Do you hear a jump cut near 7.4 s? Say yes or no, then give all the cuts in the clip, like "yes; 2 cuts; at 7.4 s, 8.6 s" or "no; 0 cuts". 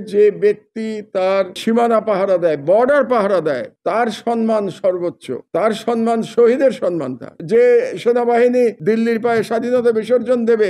yes; 1 cut; at 7.4 s